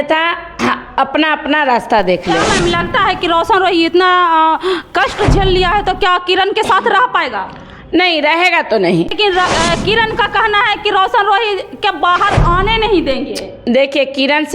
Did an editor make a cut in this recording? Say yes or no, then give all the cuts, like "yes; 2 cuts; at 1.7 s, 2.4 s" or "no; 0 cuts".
yes; 1 cut; at 9.1 s